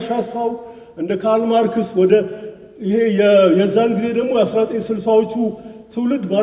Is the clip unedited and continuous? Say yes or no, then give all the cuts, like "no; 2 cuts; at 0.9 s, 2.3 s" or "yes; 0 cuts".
yes; 0 cuts